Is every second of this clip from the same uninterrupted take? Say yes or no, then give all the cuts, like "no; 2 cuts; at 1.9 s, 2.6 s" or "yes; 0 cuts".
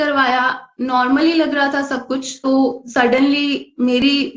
no; 1 cut; at 2.4 s